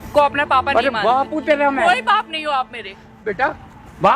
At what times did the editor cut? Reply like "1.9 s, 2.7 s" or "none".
3.2 s